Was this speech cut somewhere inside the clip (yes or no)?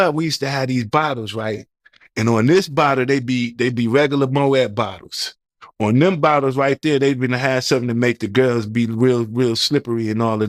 no